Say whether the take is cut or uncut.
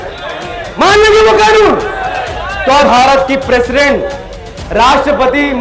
cut